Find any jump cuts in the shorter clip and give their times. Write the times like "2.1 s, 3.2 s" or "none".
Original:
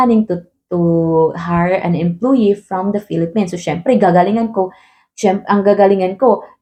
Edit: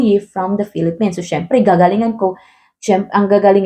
none